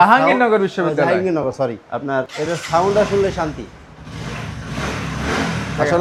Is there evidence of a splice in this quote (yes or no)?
no